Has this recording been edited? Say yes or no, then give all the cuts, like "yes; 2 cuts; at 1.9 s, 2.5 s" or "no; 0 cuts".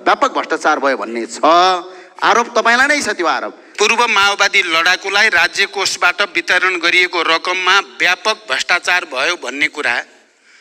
yes; 1 cut; at 3.6 s